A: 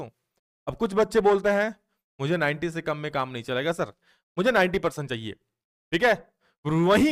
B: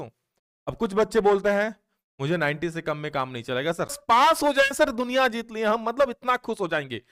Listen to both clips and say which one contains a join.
B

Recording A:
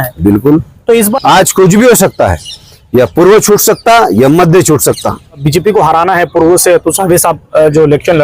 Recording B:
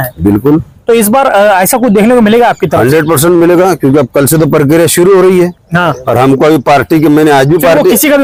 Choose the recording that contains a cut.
A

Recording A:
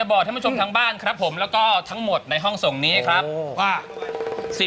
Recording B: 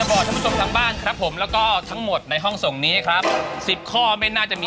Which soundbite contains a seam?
B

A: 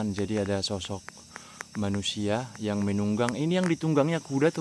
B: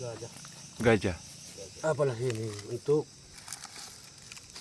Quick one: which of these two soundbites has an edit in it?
B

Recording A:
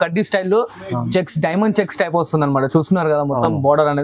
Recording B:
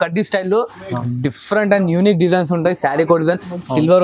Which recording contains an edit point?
B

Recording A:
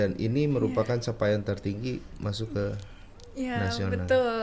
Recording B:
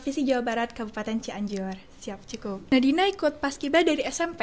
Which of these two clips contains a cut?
B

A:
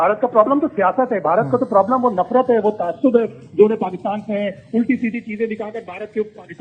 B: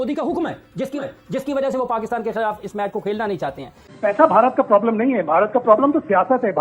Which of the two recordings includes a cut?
B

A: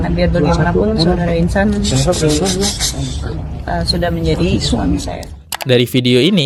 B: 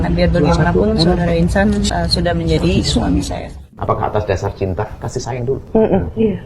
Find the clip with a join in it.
B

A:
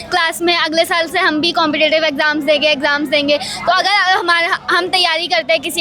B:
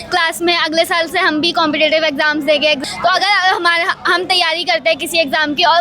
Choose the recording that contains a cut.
B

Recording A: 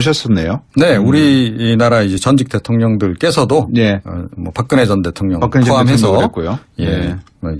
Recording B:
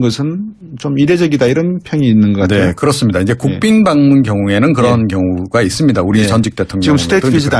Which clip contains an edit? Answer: A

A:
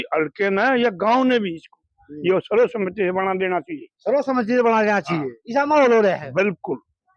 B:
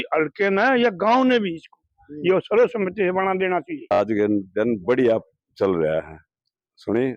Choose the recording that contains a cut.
B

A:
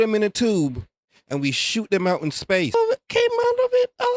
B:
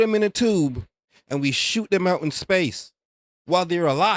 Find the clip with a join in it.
A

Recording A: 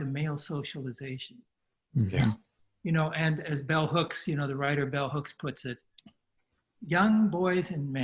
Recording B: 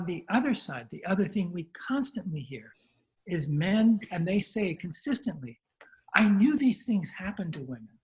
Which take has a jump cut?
B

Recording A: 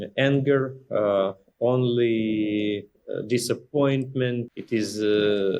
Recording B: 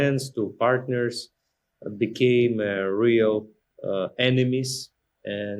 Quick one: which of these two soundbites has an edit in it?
A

